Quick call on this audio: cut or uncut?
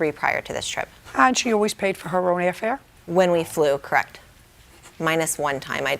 cut